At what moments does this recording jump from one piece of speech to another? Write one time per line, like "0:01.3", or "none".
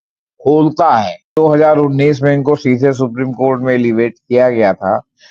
0:01.3